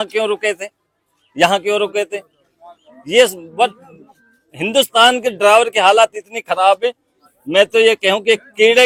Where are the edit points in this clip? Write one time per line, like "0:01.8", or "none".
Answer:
none

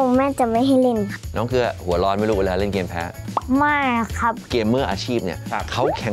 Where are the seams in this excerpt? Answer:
0:01.2
0:04.4

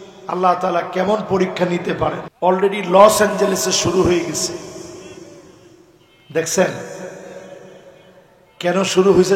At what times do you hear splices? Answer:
0:02.3

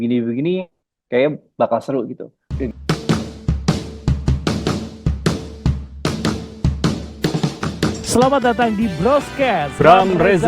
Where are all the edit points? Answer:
0:02.7

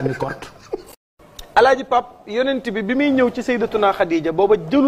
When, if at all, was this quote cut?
0:01.1

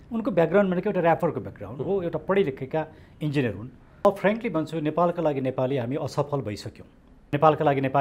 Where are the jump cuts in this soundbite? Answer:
0:04.1
0:07.3

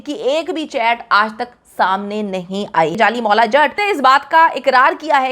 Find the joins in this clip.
0:03.0
0:03.8

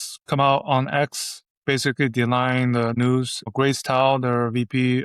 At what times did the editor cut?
0:03.0

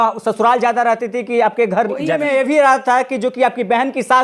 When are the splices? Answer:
0:02.2

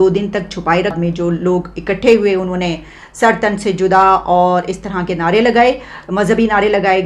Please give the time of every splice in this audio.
0:01.0

